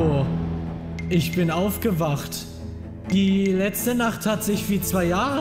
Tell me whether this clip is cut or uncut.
uncut